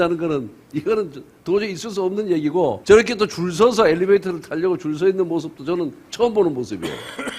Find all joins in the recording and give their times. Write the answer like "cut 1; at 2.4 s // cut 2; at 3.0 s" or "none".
cut 1; at 2.8 s